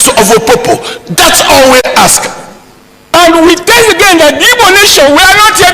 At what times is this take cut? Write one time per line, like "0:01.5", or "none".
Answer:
0:03.1